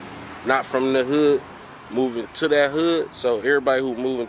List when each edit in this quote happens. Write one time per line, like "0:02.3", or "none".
none